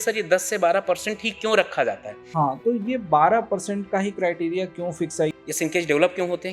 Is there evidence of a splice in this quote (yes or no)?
yes